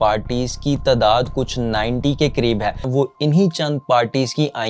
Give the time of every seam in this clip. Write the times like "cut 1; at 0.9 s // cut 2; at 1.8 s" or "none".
cut 1; at 2.8 s